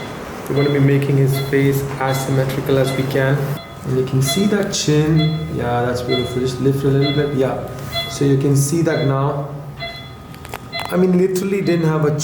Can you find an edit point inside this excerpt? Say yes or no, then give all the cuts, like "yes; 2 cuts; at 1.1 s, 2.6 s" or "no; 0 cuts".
yes; 1 cut; at 3.7 s